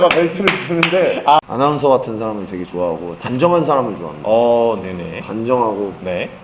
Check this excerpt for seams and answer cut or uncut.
cut